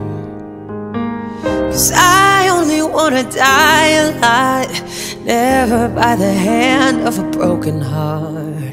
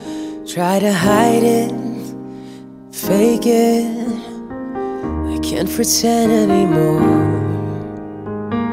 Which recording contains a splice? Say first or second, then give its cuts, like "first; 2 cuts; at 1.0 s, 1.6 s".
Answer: second; 1 cut; at 3.9 s